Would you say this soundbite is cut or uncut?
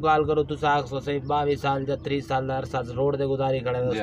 uncut